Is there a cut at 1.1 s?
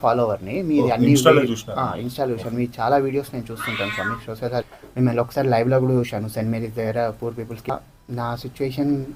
no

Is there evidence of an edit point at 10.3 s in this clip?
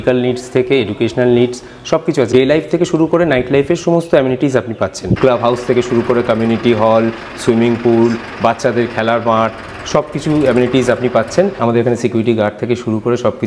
no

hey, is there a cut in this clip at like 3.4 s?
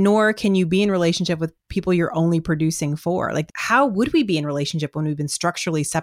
yes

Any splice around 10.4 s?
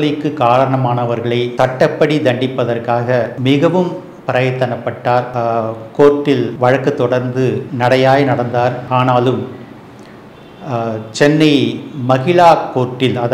no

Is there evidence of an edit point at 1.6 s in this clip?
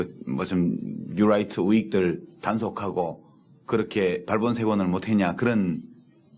yes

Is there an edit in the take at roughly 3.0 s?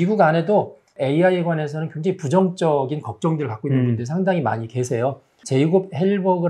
no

